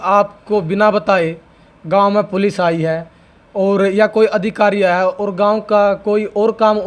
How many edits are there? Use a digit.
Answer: 0